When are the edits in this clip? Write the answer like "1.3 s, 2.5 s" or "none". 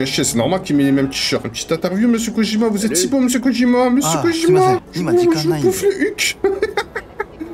1.5 s, 4.9 s